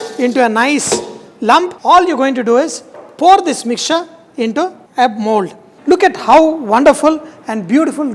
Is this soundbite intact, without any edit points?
no; 2 cuts; at 1.8 s, 5.7 s

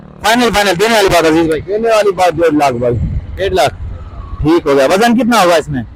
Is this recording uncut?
yes; 0 cuts

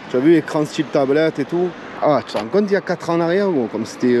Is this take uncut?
no; 1 cut; at 1.9 s

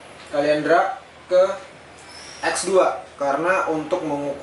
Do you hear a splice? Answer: no; 0 cuts

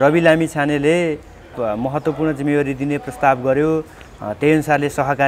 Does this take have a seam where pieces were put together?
yes; 1 cut; at 1.6 s

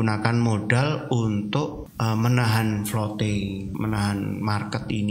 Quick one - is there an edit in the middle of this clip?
yes; 2 cuts; at 1.8 s, 3.7 s

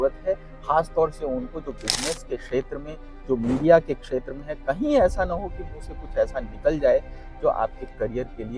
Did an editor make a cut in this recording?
no; 0 cuts

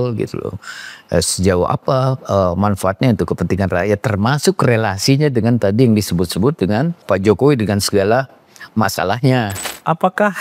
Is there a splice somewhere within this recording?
yes; 2 cuts; at 7.0 s, 9.6 s

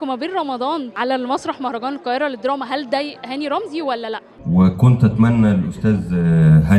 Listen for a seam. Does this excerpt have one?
yes; 2 cuts; at 0.9 s, 4.4 s

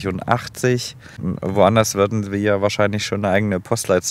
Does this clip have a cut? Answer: yes; 1 cut; at 1.3 s

